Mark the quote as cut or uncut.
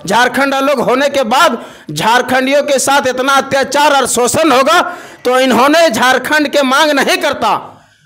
uncut